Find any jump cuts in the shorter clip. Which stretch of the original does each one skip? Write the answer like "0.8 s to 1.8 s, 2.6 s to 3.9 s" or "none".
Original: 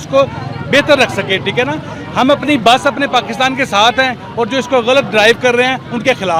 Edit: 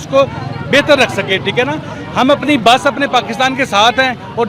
none